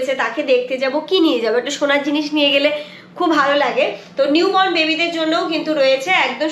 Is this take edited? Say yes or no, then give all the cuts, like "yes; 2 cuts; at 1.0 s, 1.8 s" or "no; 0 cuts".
no; 0 cuts